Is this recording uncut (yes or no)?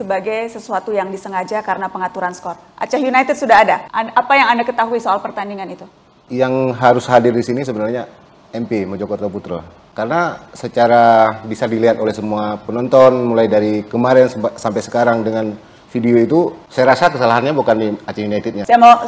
yes